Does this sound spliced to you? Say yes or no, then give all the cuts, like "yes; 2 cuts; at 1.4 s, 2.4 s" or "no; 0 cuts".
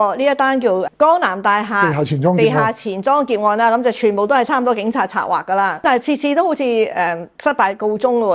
yes; 1 cut; at 5.8 s